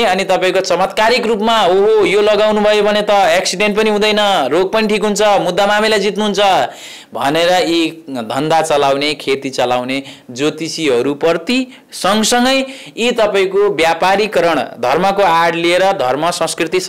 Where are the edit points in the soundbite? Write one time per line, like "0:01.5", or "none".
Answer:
none